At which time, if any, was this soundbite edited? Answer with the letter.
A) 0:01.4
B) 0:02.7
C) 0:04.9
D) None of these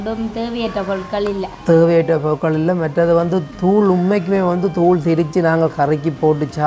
D